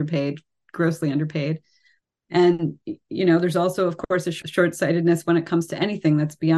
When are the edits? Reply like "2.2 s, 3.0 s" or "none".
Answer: 4.4 s